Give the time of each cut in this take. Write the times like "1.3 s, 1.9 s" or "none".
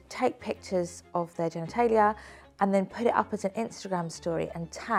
none